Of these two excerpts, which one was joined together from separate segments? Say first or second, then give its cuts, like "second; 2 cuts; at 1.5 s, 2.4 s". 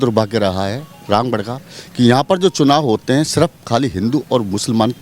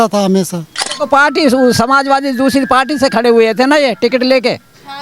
second; 1 cut; at 0.9 s